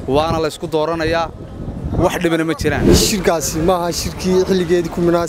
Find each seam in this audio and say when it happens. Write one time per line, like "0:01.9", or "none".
0:02.9